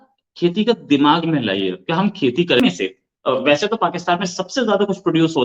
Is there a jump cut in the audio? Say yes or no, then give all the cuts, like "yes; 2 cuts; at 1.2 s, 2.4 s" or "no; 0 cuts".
yes; 1 cut; at 2.6 s